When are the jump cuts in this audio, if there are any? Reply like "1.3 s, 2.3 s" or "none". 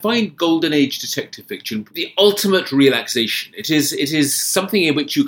1.9 s